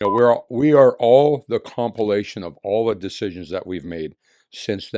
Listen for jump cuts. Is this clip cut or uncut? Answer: uncut